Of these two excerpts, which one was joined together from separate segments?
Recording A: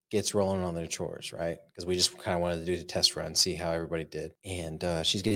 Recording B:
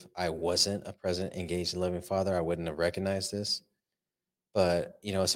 A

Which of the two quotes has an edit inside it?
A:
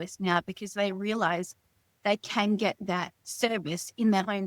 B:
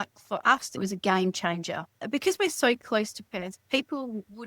B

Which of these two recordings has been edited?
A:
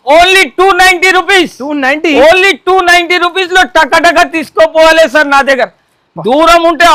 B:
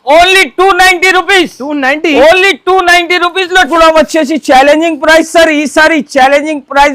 B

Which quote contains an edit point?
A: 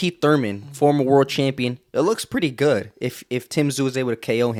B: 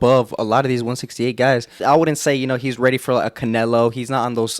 B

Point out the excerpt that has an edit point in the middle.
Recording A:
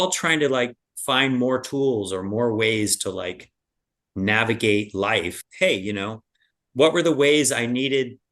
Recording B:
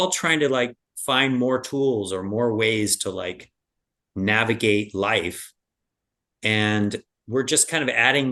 A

